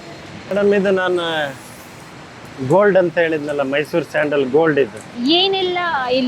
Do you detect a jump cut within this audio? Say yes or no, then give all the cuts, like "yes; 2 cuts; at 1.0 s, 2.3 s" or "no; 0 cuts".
yes; 1 cut; at 5.1 s